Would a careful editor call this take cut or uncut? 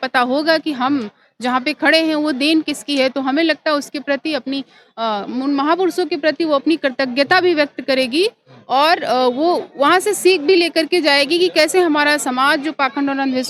uncut